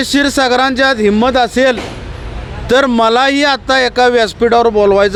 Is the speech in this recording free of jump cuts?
yes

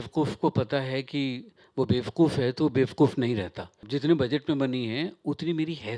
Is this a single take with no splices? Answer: no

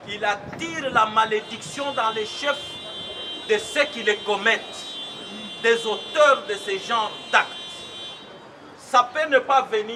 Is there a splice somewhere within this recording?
no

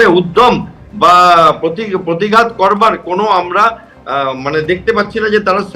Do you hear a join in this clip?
no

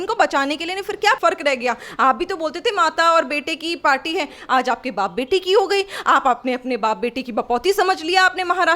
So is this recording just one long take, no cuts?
no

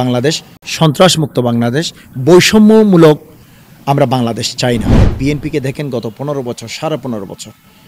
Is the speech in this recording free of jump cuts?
no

